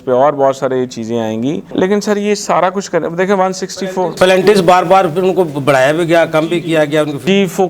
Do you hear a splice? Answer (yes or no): no